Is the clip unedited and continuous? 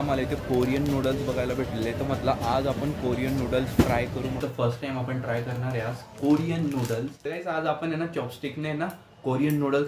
no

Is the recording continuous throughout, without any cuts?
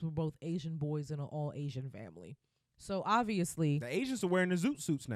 yes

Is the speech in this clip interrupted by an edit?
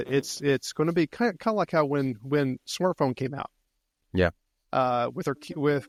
no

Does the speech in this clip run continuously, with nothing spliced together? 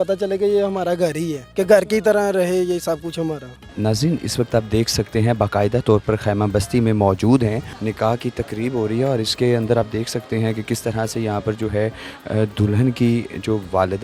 yes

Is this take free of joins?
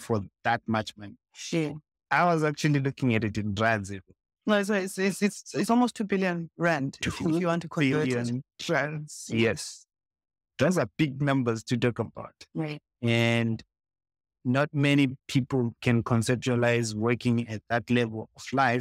yes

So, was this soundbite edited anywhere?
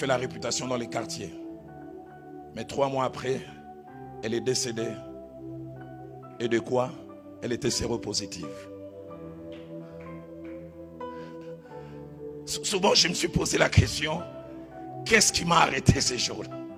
no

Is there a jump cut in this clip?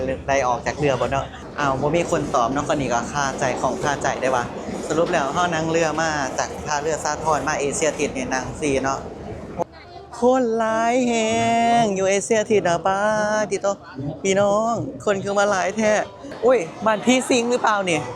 yes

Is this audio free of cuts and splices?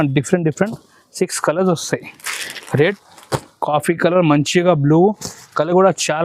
no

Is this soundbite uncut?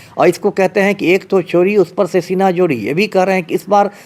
yes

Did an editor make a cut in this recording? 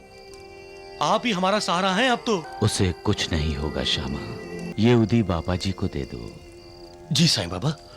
yes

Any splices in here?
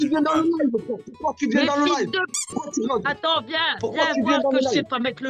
no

